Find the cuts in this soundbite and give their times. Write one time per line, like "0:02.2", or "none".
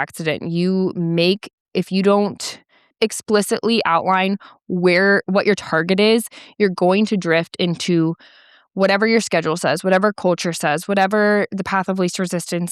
0:02.9